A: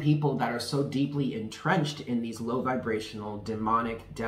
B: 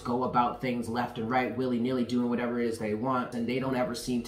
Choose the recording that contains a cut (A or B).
B